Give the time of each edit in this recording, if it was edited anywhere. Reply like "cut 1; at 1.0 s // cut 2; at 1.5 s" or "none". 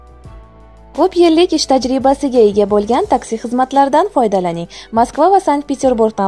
cut 1; at 1.0 s